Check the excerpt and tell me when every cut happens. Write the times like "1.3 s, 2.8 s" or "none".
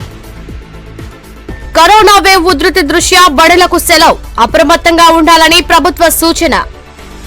0.9 s